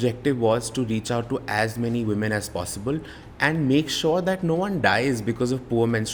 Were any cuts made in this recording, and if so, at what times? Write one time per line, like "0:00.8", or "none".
none